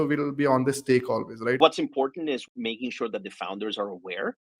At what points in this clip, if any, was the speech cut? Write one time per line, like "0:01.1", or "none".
0:01.6
0:02.5

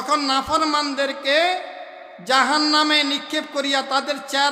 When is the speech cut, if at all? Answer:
none

